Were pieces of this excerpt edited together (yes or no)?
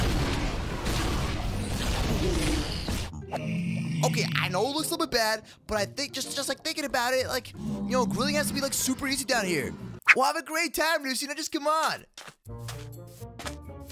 no